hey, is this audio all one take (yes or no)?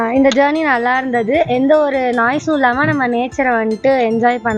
yes